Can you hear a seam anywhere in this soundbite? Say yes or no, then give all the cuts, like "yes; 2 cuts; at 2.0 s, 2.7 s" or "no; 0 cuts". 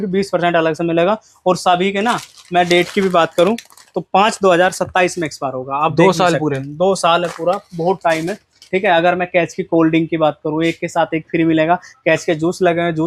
no; 0 cuts